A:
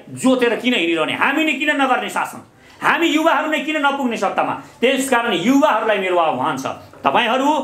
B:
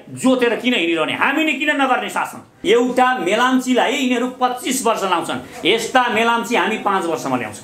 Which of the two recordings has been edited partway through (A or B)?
B